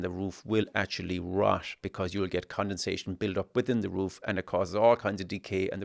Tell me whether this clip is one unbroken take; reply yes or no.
no